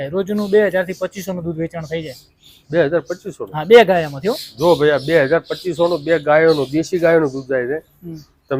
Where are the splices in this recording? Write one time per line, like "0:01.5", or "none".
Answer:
none